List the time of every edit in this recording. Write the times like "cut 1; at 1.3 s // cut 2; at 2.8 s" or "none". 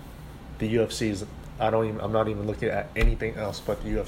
none